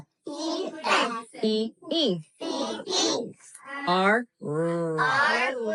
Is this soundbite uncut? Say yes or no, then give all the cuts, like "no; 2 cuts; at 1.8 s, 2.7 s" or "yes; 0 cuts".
yes; 0 cuts